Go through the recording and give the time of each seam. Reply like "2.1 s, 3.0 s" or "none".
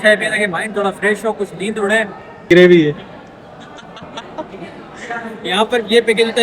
2.5 s

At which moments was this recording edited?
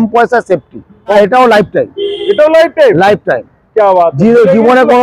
1.2 s

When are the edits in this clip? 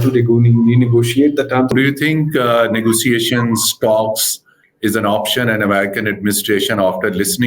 1.7 s

